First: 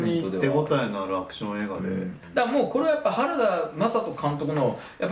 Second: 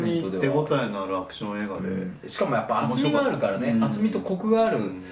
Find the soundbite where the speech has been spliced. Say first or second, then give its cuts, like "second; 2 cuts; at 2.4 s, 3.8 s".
first; 1 cut; at 2.2 s